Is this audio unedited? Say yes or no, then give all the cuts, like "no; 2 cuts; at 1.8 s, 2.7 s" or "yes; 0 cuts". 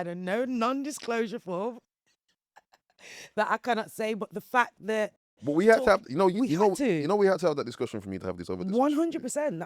yes; 0 cuts